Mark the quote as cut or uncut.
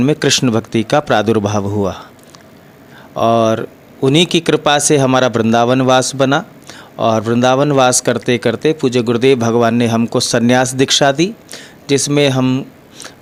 uncut